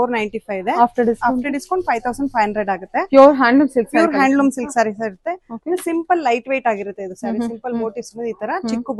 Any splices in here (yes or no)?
no